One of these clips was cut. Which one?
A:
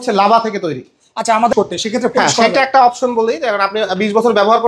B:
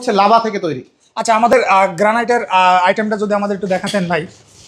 A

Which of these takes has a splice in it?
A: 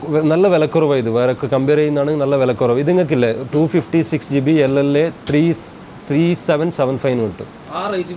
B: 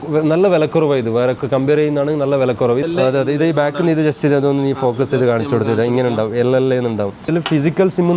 B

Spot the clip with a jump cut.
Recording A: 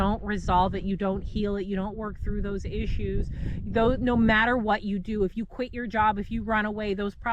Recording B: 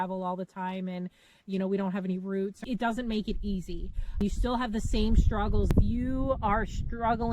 B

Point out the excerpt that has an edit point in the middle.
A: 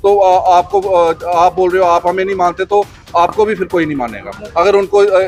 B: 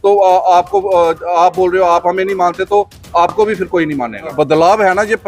B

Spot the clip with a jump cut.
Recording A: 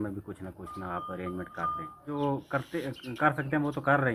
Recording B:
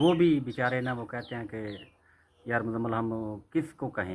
A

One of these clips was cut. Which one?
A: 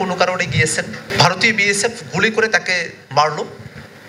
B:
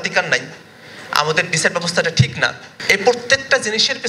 B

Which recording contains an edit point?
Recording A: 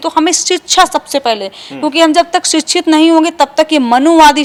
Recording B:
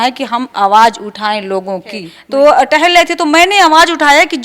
B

